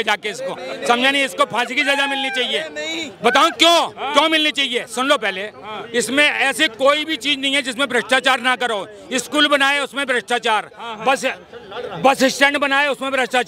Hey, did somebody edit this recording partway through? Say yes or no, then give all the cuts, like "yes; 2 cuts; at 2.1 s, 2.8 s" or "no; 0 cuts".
no; 0 cuts